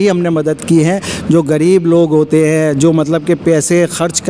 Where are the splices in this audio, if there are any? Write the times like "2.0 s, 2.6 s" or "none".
none

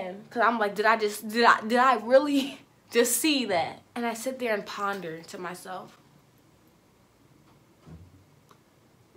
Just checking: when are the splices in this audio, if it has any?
3.8 s

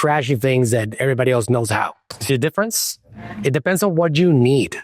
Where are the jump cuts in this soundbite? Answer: 2.0 s

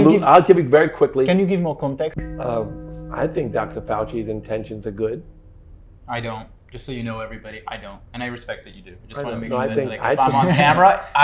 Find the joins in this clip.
2.2 s

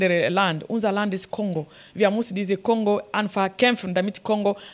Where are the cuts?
none

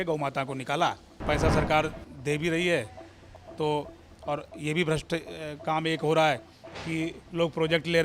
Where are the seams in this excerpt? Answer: 1.2 s

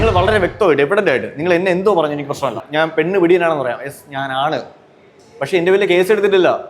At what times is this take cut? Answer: 2.6 s

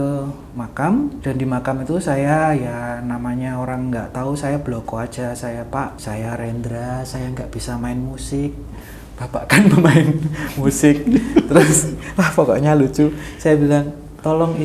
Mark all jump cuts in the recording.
1.2 s, 6.0 s

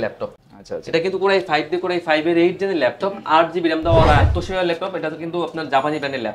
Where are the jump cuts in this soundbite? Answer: 4.1 s

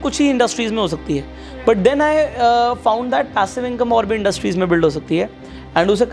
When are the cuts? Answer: none

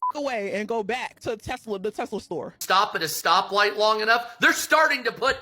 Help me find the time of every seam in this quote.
2.5 s

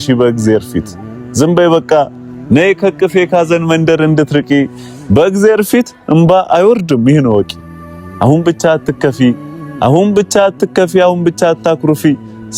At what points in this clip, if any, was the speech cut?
none

